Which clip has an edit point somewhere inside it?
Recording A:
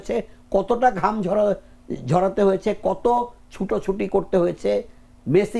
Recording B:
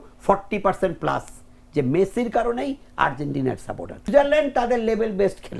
B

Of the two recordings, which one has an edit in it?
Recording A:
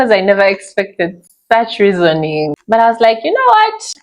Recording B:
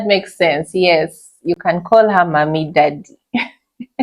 A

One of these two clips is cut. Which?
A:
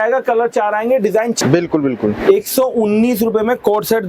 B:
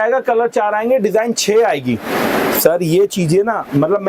A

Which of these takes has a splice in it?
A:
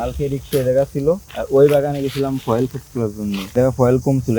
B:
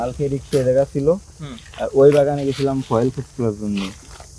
A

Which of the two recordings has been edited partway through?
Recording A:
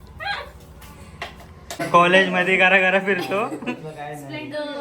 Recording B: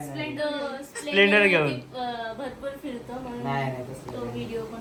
A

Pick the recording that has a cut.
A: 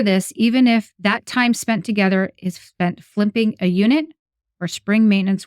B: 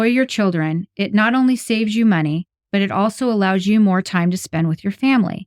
A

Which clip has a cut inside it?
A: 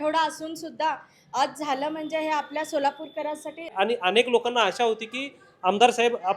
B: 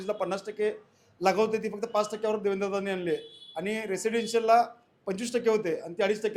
A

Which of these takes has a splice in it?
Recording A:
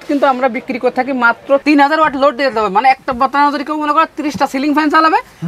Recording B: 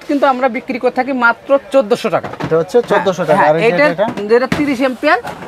A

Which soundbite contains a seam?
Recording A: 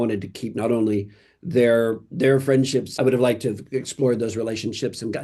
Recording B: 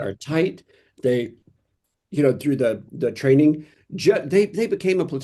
A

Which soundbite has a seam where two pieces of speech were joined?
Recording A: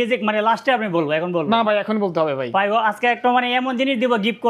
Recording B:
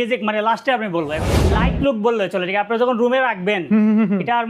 B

